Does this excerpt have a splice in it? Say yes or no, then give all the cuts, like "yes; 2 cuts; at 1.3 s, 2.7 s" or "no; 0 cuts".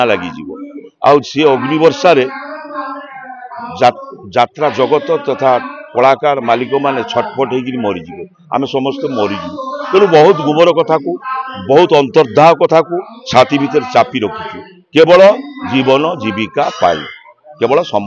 no; 0 cuts